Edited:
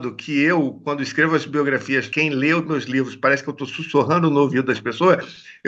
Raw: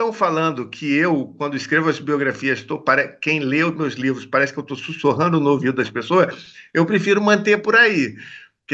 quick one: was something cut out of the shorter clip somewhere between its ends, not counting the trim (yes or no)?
yes